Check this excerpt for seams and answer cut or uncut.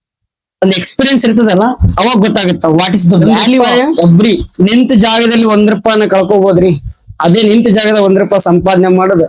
cut